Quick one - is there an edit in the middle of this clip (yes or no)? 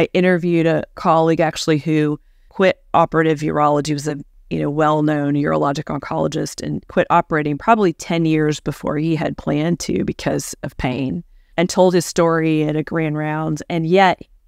yes